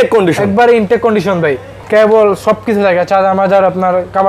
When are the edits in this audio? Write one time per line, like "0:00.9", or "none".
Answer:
0:01.7